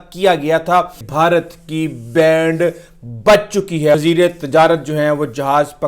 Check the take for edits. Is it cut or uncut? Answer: cut